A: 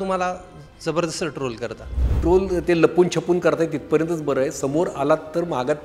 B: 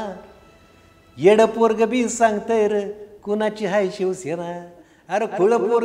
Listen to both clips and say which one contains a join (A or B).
A